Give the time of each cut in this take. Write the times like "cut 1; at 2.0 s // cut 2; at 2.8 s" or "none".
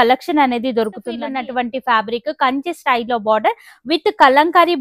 cut 1; at 1.2 s